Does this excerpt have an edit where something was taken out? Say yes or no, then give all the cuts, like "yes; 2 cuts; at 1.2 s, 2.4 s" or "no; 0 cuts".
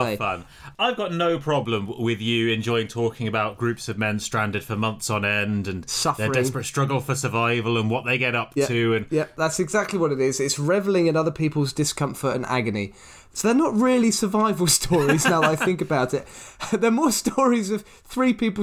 yes; 1 cut; at 13.2 s